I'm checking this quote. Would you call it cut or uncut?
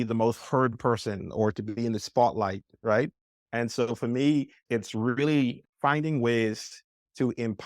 cut